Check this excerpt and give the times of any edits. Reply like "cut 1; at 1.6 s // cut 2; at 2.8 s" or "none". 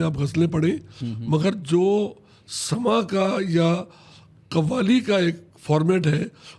none